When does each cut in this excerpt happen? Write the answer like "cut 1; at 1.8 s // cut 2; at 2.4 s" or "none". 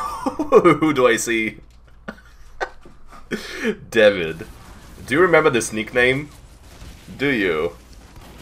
none